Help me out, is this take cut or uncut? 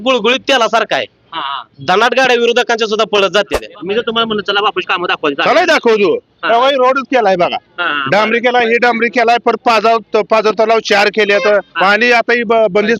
cut